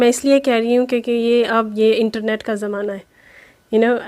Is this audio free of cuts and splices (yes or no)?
yes